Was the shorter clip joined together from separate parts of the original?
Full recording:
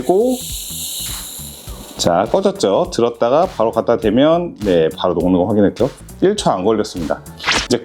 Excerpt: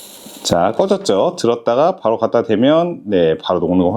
no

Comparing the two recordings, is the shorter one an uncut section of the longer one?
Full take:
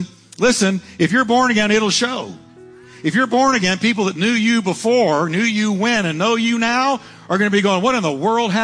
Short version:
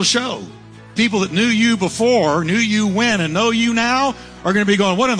no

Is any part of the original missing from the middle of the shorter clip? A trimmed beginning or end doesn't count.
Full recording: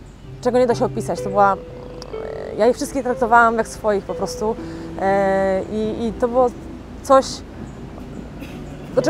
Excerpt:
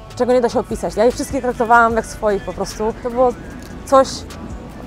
yes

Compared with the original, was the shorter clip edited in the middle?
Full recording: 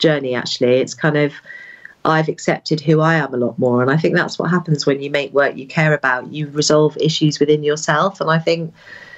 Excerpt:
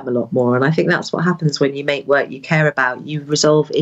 no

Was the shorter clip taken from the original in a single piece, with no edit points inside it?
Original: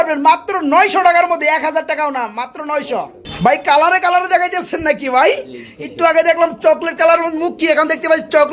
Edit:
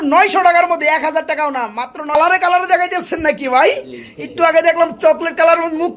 no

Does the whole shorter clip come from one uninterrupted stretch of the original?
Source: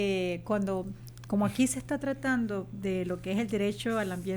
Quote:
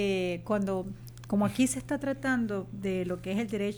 yes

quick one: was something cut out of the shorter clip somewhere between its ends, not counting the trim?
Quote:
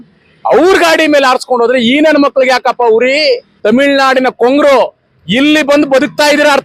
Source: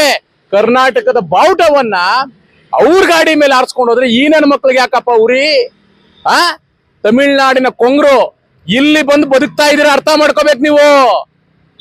yes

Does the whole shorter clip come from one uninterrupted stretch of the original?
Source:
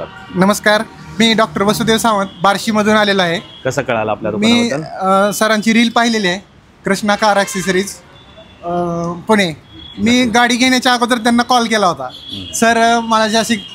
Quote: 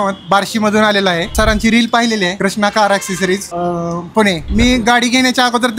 no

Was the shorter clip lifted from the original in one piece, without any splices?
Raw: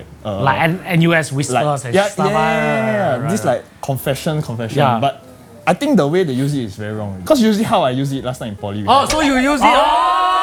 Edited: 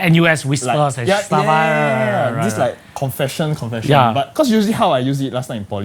no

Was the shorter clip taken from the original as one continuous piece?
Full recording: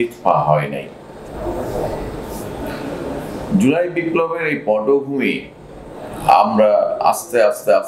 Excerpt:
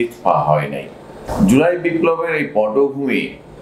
no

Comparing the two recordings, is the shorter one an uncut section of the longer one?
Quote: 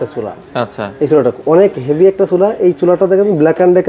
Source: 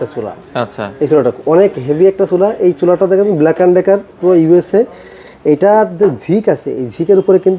yes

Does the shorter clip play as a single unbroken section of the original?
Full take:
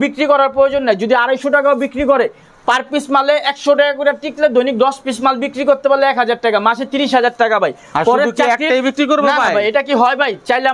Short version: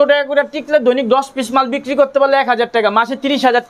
yes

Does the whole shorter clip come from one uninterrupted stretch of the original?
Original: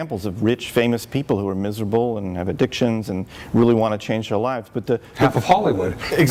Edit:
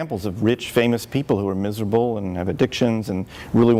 yes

